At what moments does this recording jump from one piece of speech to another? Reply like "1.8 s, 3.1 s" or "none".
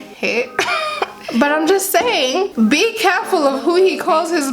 1.2 s